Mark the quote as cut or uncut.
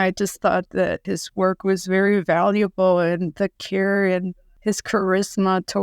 cut